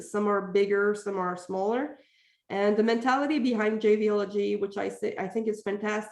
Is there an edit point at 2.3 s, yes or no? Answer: no